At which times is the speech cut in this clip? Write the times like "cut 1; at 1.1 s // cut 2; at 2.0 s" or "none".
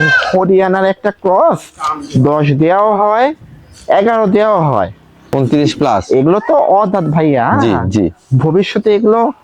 cut 1; at 5.3 s